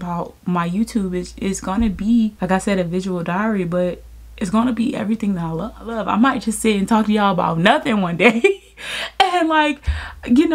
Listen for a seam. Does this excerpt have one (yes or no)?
yes